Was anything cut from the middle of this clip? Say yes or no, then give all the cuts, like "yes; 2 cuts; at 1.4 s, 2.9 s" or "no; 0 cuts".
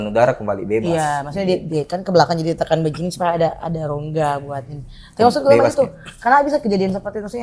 no; 0 cuts